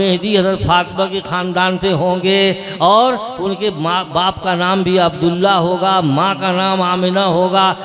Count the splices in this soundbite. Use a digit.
0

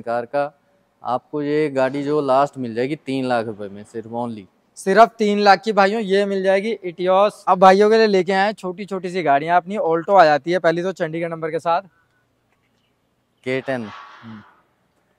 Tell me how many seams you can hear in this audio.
0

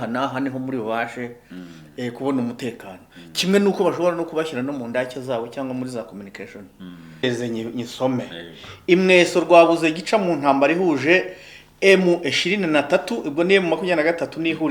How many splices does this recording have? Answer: 1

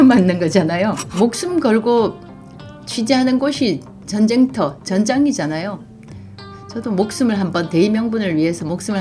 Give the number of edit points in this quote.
1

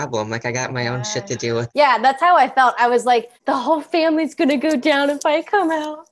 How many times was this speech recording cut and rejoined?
2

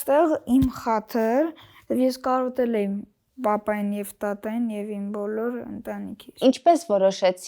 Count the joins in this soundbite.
1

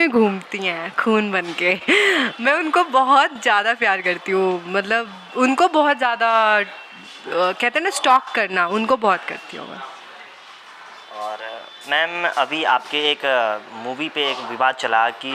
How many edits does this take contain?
0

